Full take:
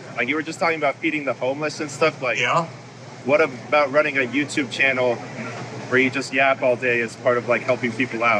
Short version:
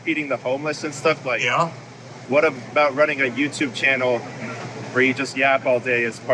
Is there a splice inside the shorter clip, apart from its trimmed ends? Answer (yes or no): no